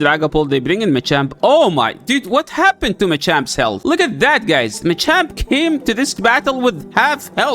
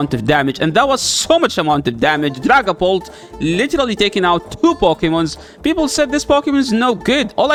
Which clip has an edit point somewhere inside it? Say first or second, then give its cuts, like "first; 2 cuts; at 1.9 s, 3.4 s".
first; 1 cut; at 3.8 s